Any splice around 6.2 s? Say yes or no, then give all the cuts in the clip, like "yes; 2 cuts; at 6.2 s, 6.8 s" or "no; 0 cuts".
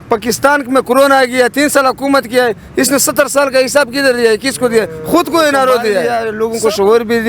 yes; 1 cut; at 6.2 s